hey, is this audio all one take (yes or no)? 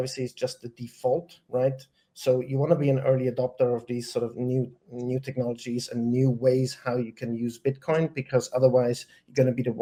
yes